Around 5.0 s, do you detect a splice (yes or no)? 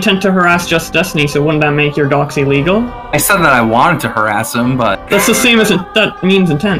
yes